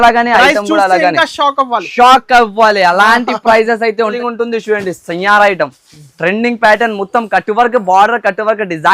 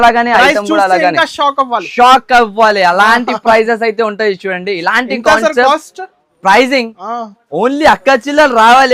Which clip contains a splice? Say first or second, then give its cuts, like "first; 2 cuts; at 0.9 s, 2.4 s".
first; 1 cut; at 4.2 s